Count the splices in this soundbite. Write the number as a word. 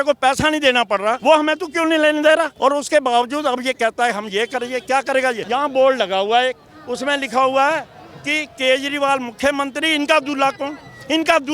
three